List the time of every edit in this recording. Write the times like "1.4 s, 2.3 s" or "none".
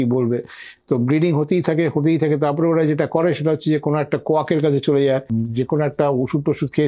5.3 s